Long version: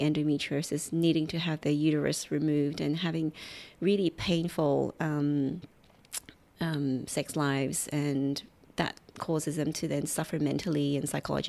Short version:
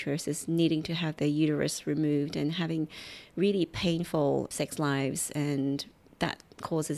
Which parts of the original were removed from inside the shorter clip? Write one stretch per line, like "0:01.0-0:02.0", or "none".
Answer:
0:04.9-0:07.1